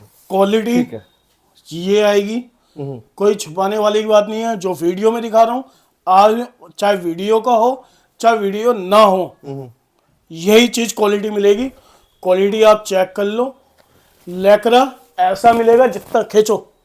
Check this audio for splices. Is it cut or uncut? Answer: uncut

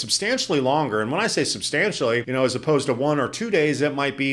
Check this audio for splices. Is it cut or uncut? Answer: cut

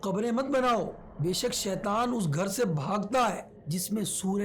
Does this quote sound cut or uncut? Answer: cut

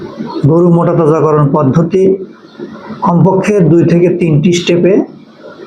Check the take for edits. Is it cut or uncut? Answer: uncut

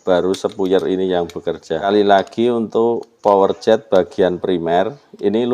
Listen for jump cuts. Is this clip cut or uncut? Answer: cut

